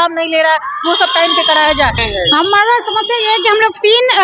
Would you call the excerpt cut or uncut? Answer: cut